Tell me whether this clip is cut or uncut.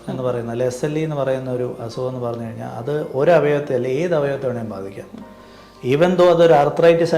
uncut